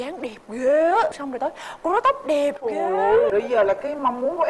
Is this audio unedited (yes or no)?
yes